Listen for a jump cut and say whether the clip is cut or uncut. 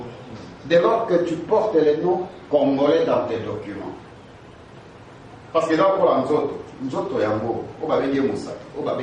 uncut